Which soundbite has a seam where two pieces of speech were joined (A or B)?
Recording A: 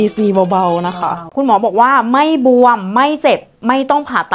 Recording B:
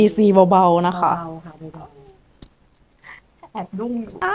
A